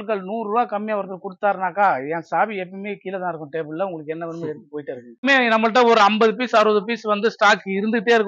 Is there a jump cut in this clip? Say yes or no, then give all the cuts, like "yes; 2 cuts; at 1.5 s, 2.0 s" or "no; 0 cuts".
yes; 1 cut; at 5.2 s